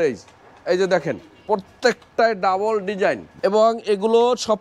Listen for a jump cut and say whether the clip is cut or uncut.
cut